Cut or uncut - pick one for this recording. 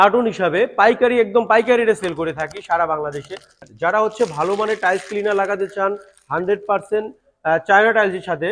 cut